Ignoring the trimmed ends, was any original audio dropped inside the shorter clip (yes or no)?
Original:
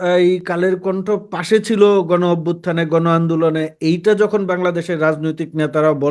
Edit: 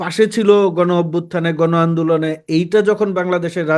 no